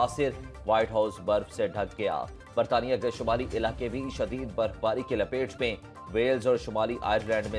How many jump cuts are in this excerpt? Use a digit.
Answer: 0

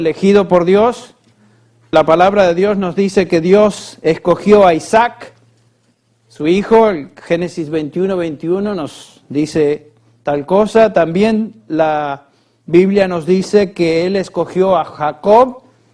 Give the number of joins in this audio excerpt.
1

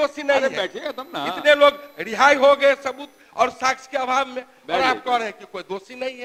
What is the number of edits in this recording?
0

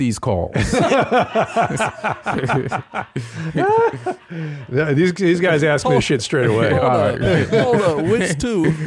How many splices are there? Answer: 0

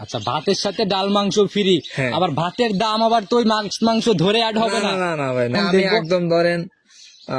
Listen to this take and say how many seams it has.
1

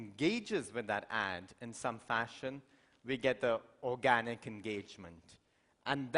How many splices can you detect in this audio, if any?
1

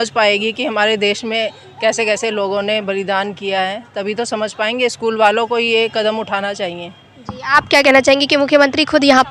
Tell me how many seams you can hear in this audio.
0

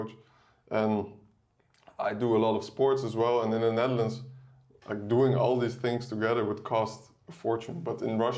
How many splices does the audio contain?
0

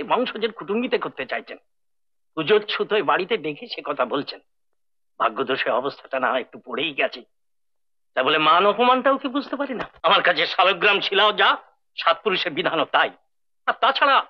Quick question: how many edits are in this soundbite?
1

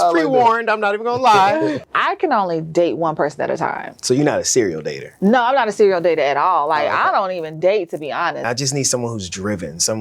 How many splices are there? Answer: 2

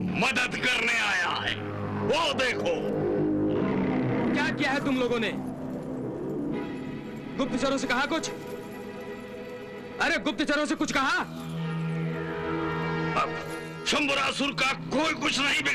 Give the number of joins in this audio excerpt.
0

